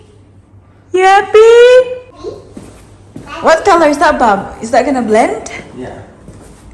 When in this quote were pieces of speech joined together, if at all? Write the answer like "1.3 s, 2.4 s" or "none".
2.1 s

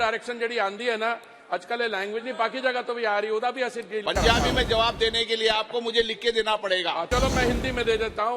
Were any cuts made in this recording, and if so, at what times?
7.1 s

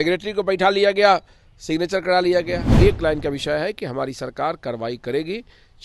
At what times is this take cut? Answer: 2.6 s

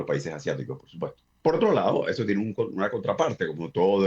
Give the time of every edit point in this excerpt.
1.3 s

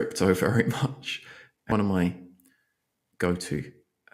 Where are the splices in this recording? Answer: 1.7 s

